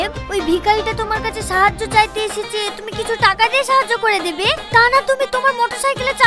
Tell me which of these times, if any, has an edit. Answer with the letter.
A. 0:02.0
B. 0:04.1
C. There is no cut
C